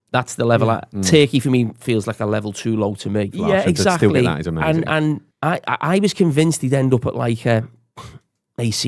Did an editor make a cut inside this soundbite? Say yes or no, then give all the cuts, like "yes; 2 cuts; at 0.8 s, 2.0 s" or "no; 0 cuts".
no; 0 cuts